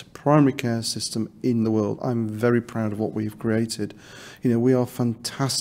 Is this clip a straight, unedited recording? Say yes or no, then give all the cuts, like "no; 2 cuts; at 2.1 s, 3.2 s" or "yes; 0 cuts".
yes; 0 cuts